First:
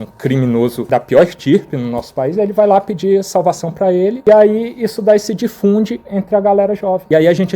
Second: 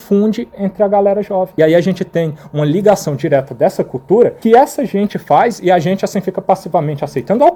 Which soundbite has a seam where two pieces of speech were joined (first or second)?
first